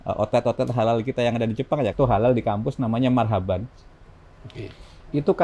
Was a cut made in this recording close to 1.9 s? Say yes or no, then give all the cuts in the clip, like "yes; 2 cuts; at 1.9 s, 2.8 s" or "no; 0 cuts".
yes; 1 cut; at 1.9 s